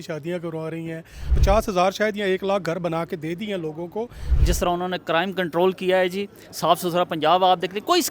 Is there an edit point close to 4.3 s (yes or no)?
yes